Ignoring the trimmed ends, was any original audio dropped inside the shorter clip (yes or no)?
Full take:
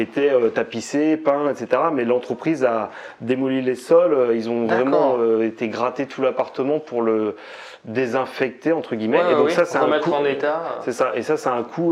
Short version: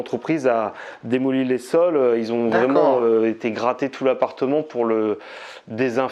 no